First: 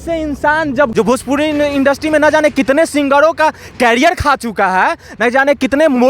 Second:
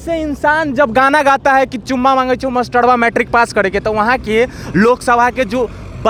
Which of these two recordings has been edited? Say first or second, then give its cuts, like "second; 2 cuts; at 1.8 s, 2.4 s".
first; 1 cut; at 0.9 s